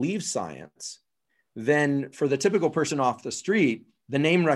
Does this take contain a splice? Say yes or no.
no